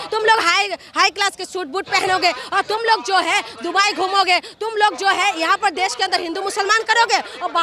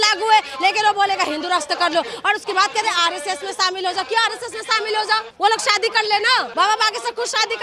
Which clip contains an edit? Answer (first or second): second